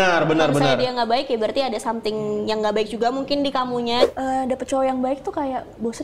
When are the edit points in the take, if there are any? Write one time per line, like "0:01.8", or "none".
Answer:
0:04.1